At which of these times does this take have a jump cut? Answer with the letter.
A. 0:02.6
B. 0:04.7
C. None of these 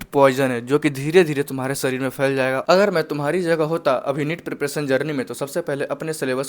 A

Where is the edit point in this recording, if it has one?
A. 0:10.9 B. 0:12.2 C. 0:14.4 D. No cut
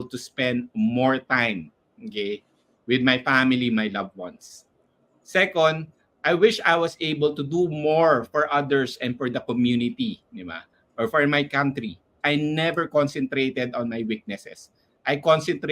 B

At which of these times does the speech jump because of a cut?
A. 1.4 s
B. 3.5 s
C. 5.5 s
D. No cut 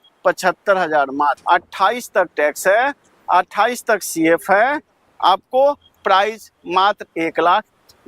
A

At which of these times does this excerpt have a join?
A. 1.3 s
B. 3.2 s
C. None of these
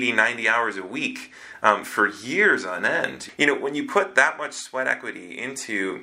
B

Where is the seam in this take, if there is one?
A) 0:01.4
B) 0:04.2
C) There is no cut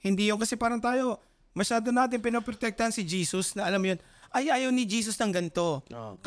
C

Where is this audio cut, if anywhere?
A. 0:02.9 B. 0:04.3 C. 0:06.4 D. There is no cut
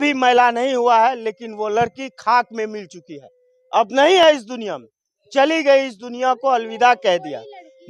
D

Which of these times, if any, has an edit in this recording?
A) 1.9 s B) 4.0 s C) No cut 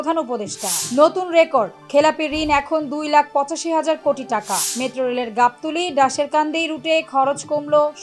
C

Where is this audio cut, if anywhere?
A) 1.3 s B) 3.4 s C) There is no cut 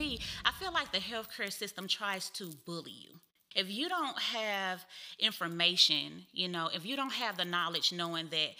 B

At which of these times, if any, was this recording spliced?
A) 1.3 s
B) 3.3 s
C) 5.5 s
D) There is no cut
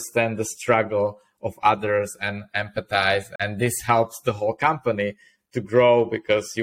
B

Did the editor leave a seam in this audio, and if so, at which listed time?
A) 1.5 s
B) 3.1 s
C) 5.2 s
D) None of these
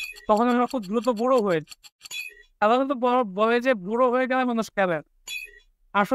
D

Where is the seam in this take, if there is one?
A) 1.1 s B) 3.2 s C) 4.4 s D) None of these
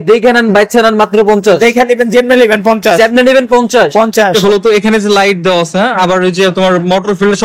C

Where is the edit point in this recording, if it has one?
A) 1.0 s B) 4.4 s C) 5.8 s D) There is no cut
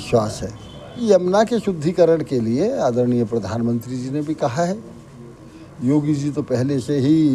A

